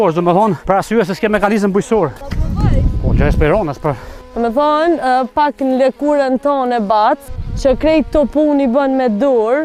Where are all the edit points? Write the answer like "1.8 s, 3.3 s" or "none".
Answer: none